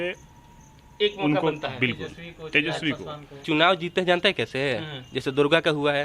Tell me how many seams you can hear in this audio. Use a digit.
1